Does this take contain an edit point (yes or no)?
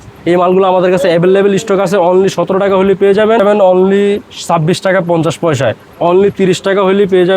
yes